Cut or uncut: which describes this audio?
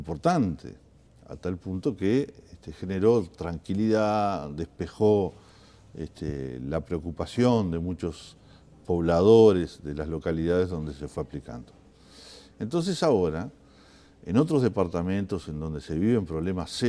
cut